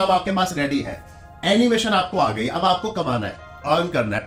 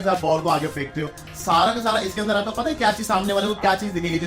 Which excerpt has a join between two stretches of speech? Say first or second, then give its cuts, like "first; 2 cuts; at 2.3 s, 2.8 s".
second; 1 cut; at 1.3 s